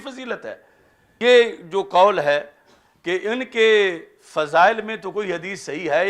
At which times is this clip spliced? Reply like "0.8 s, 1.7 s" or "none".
1.2 s